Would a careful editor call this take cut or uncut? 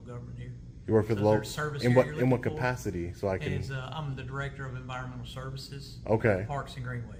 uncut